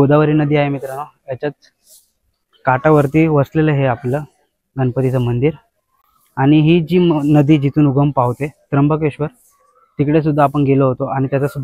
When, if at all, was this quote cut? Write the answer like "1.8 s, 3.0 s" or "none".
none